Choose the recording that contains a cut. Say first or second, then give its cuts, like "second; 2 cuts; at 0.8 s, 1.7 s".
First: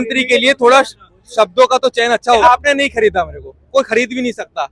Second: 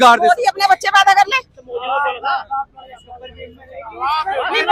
first; 1 cut; at 2.4 s